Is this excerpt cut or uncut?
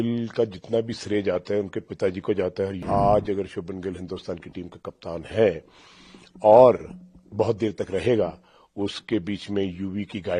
cut